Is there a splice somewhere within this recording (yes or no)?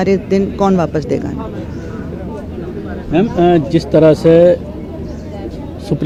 no